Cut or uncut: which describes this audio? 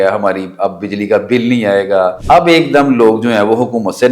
cut